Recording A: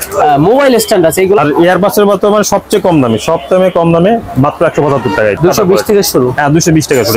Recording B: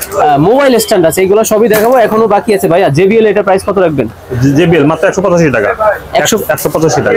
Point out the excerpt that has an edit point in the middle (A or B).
A